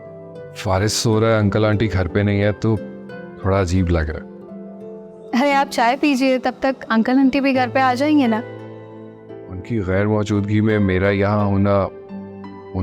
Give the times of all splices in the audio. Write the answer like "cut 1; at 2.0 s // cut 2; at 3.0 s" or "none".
none